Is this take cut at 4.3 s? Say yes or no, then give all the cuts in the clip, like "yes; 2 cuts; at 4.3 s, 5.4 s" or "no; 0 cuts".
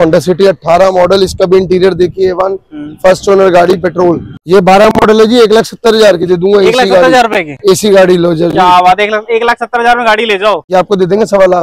yes; 2 cuts; at 4.3 s, 10.6 s